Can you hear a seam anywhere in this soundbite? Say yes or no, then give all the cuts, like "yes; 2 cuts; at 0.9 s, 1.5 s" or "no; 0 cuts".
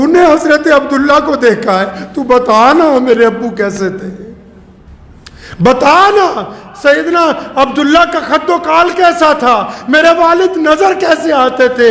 no; 0 cuts